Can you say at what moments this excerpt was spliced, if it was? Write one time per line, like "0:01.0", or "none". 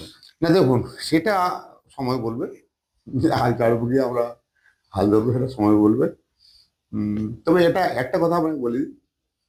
none